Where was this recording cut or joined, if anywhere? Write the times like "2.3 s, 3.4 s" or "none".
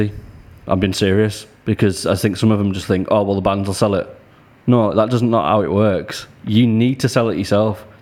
none